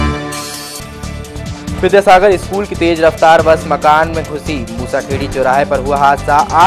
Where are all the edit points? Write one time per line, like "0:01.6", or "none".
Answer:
0:01.3